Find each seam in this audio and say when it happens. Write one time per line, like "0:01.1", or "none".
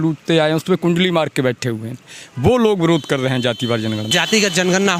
0:02.1
0:04.1

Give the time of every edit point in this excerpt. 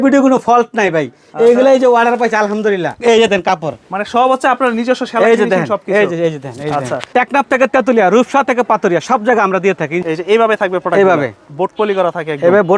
0:03.0
0:07.1
0:10.0

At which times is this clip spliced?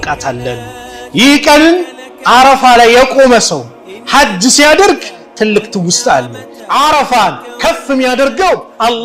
0:06.5

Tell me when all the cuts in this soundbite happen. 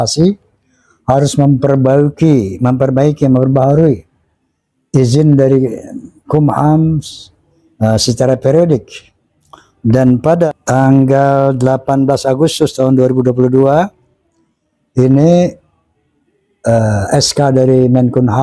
none

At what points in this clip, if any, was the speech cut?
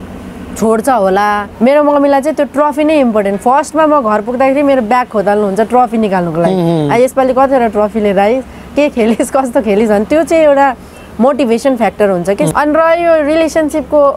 0:01.5
0:12.5

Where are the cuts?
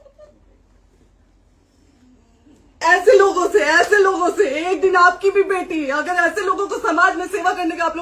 0:02.8

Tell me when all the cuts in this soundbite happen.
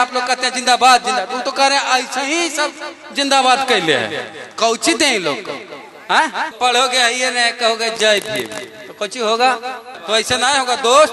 0:06.6
0:09.9

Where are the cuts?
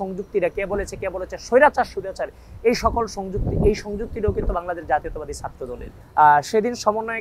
0:06.0

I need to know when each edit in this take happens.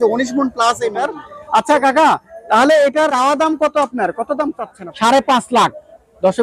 0:01.0
0:03.1
0:04.7

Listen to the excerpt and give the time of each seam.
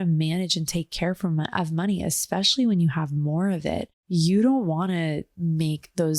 0:03.9

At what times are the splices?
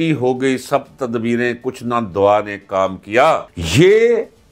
0:03.6

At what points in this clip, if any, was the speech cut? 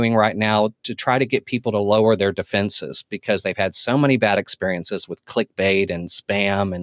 none

